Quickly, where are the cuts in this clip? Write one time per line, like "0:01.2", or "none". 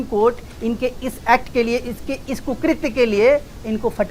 none